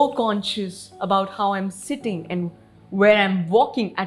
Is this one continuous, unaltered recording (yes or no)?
yes